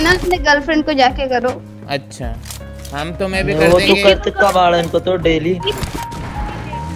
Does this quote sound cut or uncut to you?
uncut